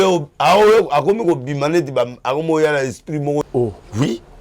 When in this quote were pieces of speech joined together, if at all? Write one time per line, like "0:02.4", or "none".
0:03.5